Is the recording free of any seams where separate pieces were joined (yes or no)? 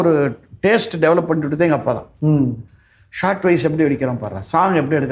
yes